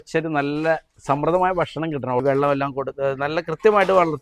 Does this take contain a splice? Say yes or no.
yes